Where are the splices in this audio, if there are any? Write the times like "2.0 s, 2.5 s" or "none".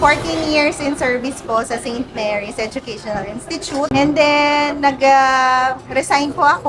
none